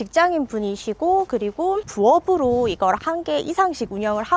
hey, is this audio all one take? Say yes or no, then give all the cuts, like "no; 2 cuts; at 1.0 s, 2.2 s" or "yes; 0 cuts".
yes; 0 cuts